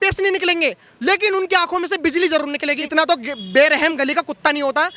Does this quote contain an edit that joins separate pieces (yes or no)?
yes